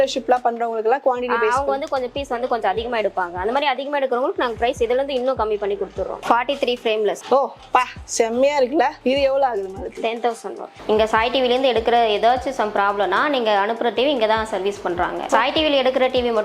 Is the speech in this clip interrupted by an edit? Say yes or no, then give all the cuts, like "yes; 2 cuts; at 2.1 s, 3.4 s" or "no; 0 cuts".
yes; 2 cuts; at 6.1 s, 10.7 s